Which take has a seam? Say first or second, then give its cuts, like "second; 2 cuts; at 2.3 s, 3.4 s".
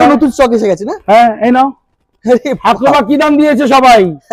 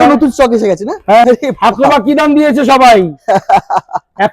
second; 1 cut; at 1.2 s